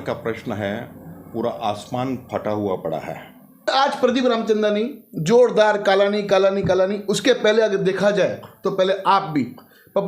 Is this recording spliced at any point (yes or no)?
yes